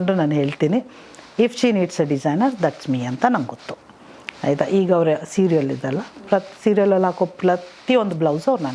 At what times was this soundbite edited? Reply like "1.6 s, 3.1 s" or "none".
none